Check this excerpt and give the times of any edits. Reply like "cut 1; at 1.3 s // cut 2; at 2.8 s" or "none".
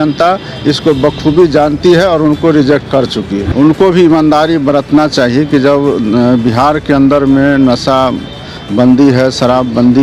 cut 1; at 3.4 s